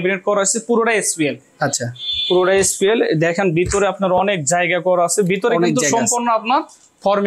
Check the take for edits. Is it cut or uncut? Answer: uncut